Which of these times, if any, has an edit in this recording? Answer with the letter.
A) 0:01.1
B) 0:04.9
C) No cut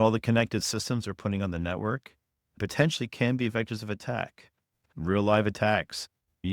B